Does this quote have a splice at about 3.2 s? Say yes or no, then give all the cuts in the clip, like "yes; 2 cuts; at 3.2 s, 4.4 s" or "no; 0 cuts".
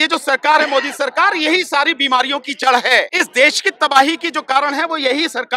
yes; 1 cut; at 3.2 s